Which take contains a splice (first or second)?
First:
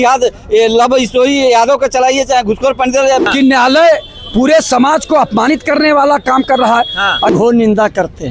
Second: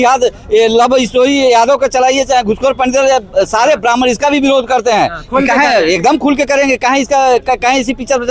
first